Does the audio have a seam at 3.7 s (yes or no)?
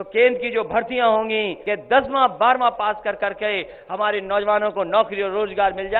no